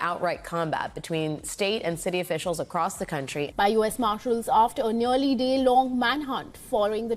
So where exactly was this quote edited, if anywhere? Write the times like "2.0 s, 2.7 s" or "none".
3.5 s